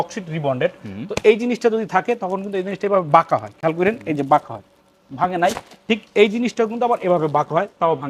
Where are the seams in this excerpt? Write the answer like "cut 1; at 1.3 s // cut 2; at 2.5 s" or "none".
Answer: none